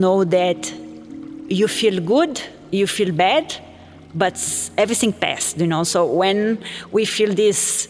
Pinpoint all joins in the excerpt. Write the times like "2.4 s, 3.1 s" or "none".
none